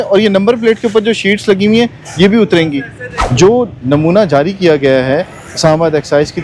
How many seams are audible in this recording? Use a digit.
1